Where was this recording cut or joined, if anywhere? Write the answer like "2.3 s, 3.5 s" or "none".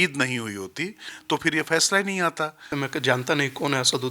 2.7 s